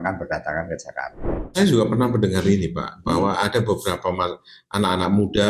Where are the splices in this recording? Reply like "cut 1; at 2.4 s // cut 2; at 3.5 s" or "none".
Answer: cut 1; at 1.5 s